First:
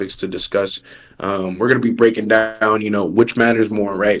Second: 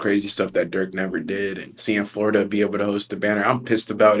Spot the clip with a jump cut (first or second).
second